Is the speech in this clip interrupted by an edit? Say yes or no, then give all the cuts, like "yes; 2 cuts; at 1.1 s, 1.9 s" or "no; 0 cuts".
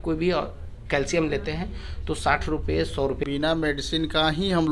yes; 1 cut; at 3.2 s